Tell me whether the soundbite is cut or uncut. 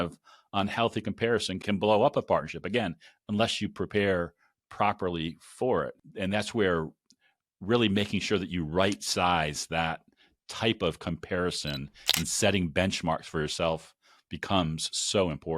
cut